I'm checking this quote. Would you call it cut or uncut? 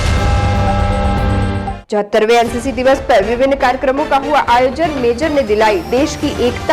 cut